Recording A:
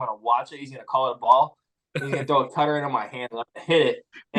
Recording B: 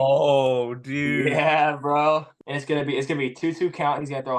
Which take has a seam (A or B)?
B